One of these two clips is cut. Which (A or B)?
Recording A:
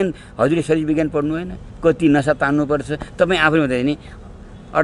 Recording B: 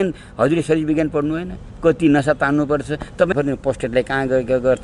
B